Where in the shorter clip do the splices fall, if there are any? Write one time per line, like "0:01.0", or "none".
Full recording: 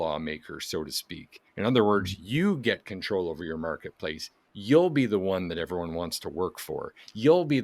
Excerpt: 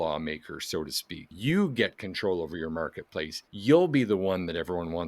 0:01.3
0:03.4

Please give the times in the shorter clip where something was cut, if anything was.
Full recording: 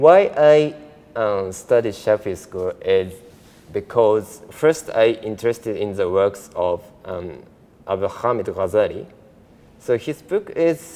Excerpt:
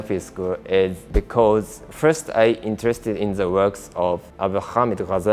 0:01.0
0:04.3

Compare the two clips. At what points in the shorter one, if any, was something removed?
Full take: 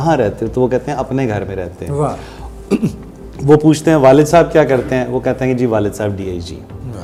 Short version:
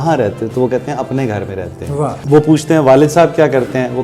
0:02.2

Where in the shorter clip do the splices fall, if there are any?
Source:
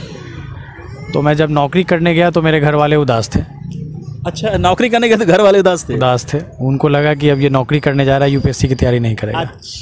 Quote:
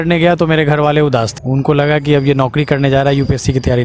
0:01.3

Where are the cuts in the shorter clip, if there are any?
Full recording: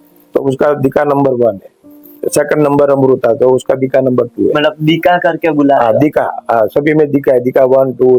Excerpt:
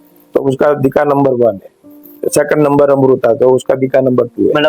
none

